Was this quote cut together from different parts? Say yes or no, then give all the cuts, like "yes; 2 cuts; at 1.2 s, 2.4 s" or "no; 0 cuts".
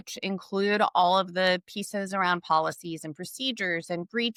no; 0 cuts